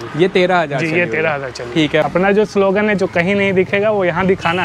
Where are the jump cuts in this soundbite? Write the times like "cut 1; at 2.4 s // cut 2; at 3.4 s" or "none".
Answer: cut 1; at 2.1 s